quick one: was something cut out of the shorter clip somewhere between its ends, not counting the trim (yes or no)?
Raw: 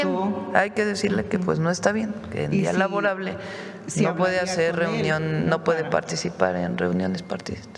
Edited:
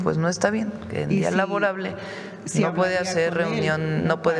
no